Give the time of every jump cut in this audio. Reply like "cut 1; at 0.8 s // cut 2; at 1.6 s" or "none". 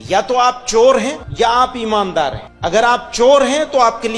cut 1; at 1.2 s // cut 2; at 2.5 s